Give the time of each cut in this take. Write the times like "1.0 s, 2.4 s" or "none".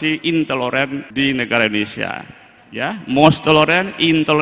1.1 s